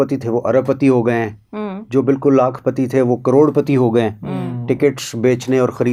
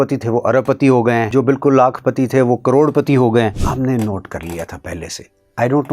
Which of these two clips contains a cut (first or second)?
second